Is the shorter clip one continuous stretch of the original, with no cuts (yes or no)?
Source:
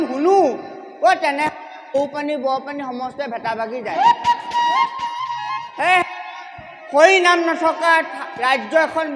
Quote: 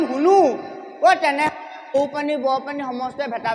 yes